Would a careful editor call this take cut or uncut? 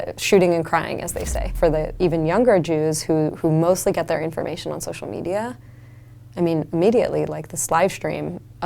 cut